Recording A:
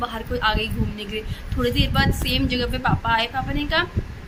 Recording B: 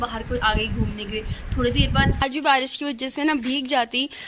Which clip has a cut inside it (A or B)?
B